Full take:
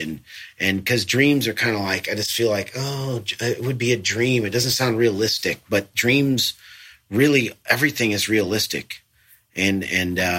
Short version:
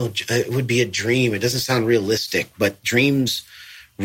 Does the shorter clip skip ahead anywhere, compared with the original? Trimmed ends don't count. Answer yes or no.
no